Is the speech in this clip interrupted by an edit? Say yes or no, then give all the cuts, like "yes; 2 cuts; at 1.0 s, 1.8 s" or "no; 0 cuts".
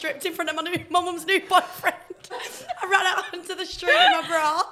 no; 0 cuts